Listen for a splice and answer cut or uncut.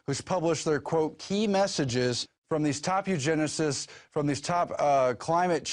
cut